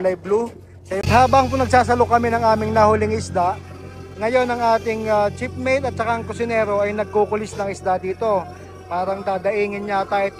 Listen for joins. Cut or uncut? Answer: cut